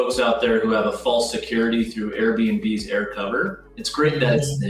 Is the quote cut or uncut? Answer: uncut